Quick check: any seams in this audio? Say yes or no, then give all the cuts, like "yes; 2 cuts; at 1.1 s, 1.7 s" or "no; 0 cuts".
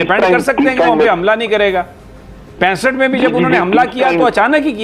no; 0 cuts